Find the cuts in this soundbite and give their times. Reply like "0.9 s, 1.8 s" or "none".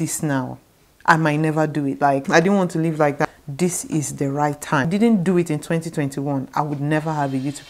2.3 s, 3.2 s, 4.9 s

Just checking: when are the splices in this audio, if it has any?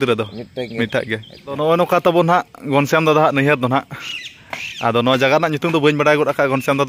1.6 s

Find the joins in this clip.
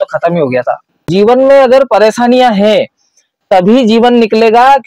1.0 s

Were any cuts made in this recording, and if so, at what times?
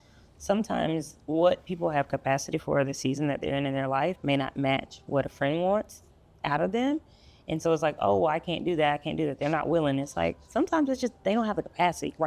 none

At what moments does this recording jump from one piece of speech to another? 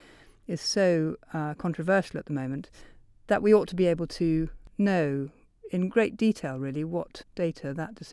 4.6 s, 7.2 s

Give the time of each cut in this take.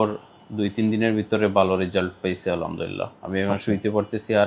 none

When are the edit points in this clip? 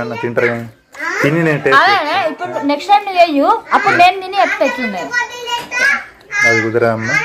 none

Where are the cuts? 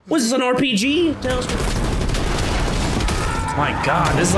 1.4 s

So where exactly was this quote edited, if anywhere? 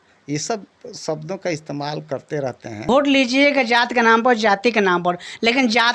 2.9 s

